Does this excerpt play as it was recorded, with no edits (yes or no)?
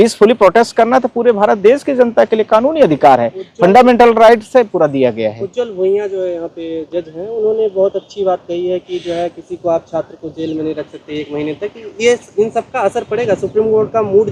yes